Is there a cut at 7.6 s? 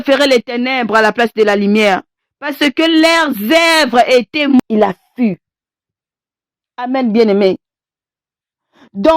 no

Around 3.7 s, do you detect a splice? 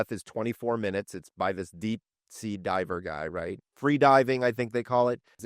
yes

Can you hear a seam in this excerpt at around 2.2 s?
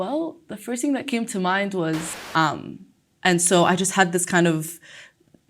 yes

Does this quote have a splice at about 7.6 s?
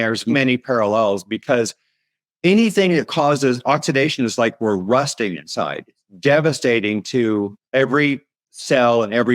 yes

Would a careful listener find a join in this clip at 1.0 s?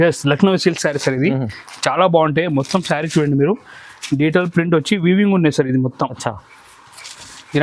no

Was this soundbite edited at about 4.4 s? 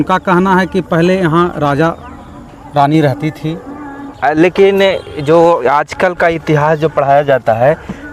yes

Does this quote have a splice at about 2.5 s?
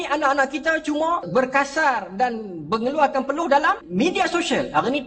no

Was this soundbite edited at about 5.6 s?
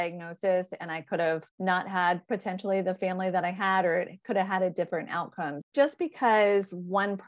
yes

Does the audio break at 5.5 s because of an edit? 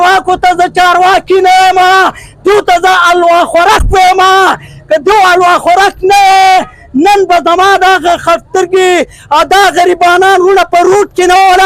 no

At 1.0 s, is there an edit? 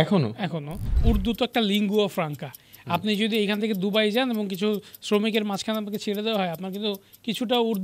yes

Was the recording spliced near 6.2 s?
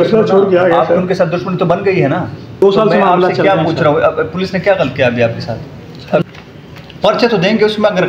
yes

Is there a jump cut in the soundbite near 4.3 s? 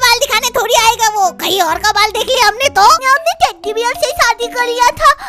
no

